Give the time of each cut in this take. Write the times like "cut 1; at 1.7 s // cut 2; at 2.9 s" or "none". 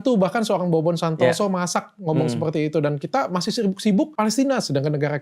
cut 1; at 4.1 s